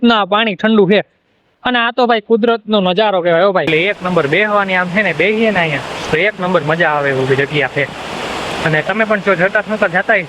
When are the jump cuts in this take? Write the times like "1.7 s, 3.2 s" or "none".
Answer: 3.7 s